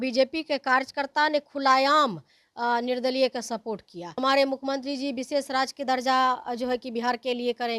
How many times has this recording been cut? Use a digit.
1